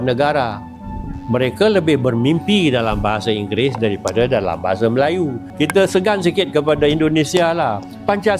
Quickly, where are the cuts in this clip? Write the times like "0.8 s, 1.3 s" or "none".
5.4 s

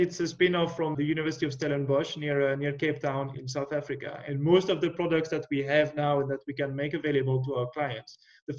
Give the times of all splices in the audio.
0.9 s, 3.4 s

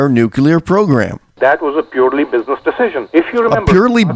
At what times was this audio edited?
1.2 s, 3.0 s

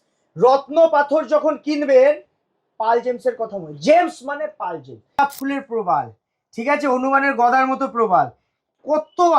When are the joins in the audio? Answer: 5.2 s

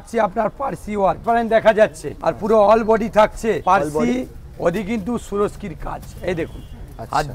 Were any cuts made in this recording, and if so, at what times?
1.2 s, 2.1 s, 3.6 s

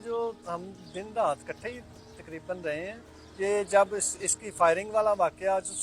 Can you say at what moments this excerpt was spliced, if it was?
none

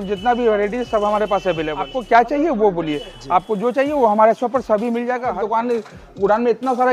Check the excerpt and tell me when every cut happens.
2.0 s, 5.4 s

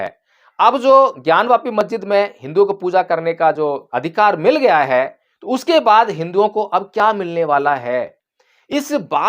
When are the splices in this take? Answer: 3.9 s

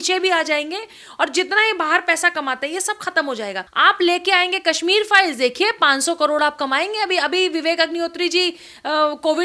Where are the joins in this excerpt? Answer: 3.6 s

